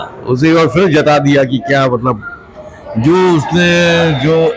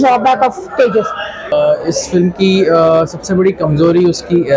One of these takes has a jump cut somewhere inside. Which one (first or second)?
second